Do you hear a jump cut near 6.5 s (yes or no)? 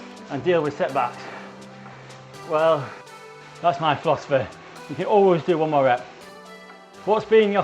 yes